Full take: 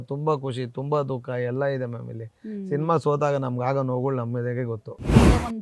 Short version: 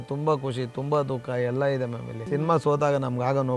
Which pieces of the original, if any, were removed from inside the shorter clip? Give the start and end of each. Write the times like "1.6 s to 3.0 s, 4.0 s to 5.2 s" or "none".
2.1 s to 2.5 s